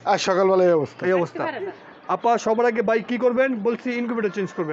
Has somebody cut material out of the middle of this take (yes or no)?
yes